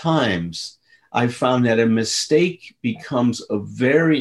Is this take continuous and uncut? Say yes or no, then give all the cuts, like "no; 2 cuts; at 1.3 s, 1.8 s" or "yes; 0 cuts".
yes; 0 cuts